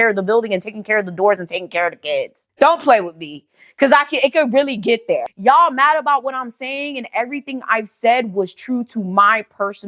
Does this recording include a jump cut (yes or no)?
yes